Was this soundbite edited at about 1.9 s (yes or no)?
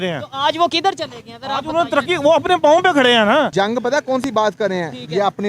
no